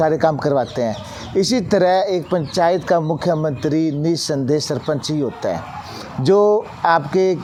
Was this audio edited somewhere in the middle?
no; 0 cuts

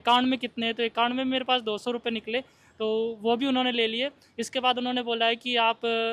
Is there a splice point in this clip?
no; 0 cuts

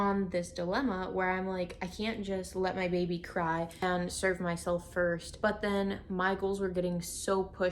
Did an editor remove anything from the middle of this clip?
yes; 2 cuts; at 3.8 s, 5.3 s

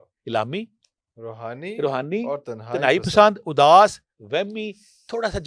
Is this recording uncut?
yes; 0 cuts

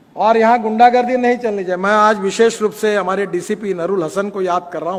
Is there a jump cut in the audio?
no; 0 cuts

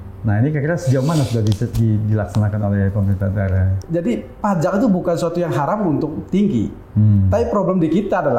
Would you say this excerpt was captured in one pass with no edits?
no; 1 cut; at 3.7 s

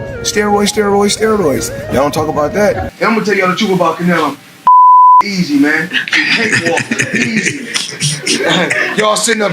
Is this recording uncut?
no; 1 cut; at 2.9 s

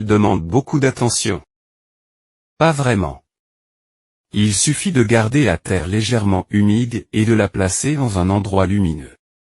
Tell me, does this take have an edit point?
yes; 1 cut; at 4.6 s

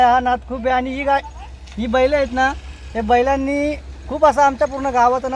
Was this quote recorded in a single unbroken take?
yes; 0 cuts

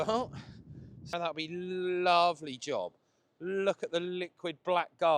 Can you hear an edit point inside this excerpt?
yes; 1 cut; at 1.1 s

